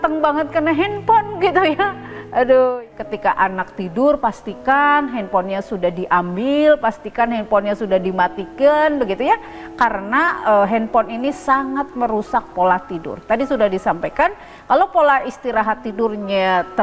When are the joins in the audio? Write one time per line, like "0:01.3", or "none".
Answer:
0:02.7